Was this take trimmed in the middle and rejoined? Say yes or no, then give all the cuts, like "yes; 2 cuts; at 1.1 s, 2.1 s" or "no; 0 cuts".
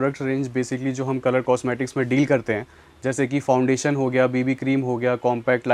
no; 0 cuts